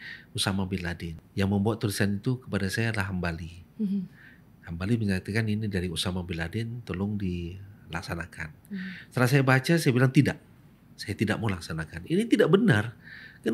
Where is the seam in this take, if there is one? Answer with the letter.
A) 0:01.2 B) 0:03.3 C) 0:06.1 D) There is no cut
A